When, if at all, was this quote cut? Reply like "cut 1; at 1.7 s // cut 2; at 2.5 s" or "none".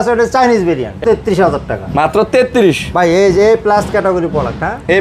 cut 1; at 1.0 s